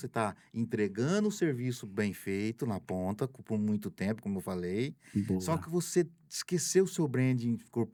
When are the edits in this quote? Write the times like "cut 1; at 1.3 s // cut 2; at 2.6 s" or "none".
none